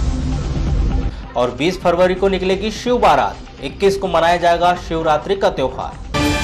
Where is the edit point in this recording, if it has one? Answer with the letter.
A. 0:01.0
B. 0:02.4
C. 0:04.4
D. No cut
A